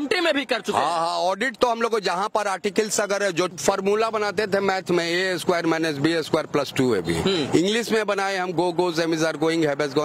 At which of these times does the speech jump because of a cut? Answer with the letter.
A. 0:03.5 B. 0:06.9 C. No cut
A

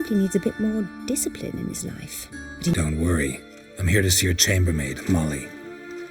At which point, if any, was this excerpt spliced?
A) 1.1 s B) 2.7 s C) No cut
B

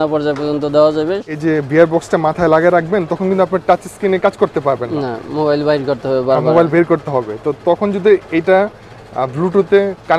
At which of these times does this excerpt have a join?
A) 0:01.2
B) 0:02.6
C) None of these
A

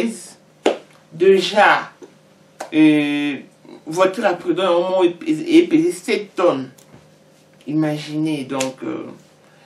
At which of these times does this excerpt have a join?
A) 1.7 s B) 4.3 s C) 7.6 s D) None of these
D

